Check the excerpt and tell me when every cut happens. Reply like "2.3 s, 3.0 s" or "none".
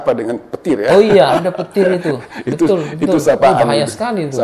none

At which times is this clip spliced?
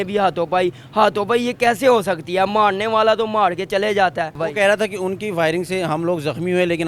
4.4 s

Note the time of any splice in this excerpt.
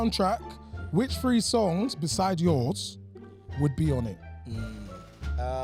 none

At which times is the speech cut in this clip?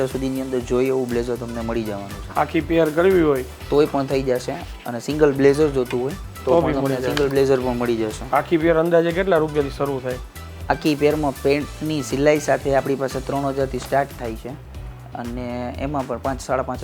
none

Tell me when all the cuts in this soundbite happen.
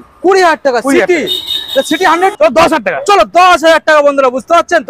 2.4 s

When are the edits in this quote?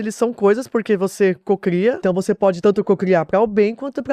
2.4 s

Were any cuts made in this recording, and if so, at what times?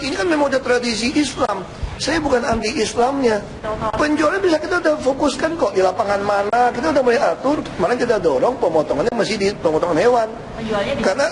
none

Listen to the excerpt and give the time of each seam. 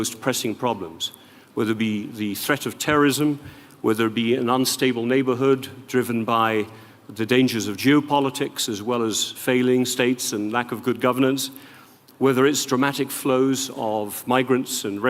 none

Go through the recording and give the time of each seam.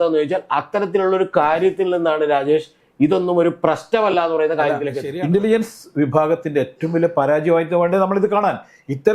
5.0 s

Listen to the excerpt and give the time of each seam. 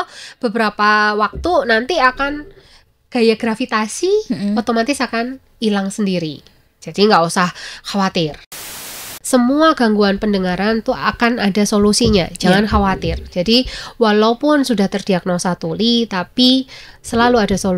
8.8 s

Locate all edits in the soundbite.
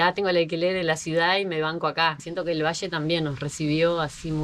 2.1 s

